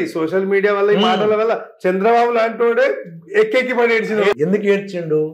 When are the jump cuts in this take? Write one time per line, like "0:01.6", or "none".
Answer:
0:04.3